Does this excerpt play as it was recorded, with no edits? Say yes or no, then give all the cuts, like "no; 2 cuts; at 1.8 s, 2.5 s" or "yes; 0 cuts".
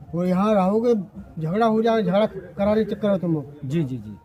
yes; 0 cuts